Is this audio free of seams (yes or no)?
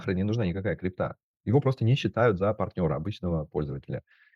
no